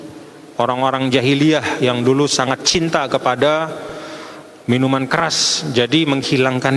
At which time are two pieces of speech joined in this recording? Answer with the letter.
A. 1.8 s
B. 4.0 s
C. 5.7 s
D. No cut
D